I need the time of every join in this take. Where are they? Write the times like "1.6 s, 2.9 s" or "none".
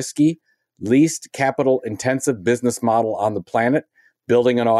none